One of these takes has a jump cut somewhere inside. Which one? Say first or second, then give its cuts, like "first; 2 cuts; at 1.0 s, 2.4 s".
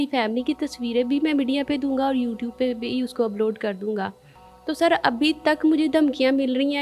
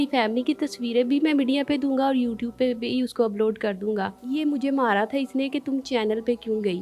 second; 1 cut; at 4.2 s